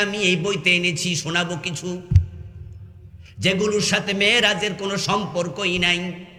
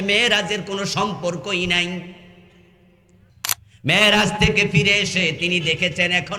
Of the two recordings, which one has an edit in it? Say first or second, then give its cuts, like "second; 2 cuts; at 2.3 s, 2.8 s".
second; 1 cut; at 3.3 s